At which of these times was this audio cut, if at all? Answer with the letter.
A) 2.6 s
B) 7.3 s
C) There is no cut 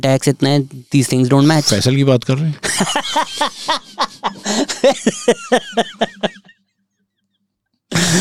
C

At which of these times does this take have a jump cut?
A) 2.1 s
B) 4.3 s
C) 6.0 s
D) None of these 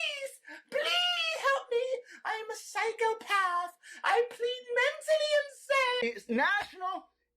C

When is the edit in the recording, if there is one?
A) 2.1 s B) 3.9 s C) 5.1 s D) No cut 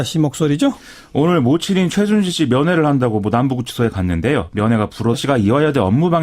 D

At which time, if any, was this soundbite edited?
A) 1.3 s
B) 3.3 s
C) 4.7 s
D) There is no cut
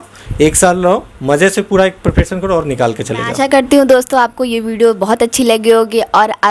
B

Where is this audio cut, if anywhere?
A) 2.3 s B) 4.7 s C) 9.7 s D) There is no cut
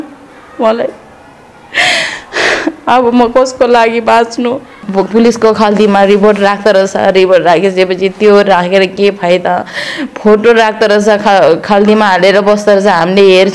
B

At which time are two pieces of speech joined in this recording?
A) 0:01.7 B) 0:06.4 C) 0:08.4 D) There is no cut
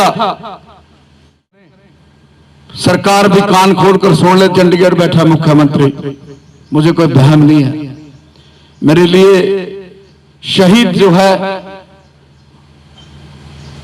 A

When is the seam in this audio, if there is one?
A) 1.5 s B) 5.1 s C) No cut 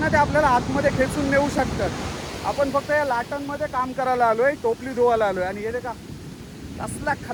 C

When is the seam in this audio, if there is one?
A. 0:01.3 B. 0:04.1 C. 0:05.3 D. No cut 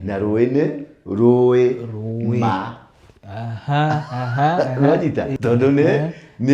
C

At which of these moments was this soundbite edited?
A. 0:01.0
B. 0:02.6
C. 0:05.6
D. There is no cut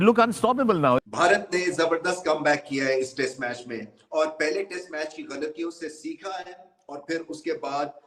A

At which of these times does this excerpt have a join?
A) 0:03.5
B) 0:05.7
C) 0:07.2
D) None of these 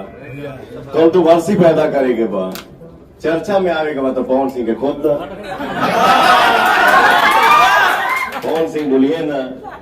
D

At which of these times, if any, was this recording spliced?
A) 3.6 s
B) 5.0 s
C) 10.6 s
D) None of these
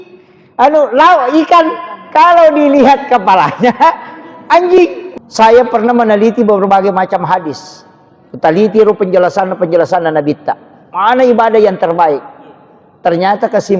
B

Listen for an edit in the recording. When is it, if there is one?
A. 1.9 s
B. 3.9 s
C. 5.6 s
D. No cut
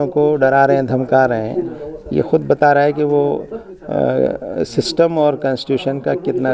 D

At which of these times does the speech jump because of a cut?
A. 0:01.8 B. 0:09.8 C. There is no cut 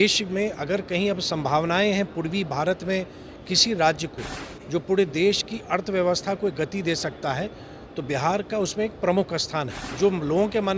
B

